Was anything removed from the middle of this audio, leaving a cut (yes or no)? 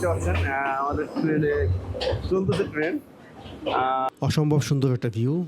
yes